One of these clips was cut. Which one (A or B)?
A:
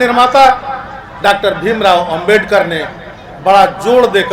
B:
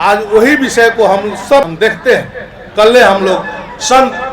B